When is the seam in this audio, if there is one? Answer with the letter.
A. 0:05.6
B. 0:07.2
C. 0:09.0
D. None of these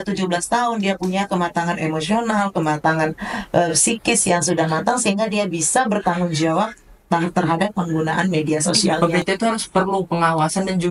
C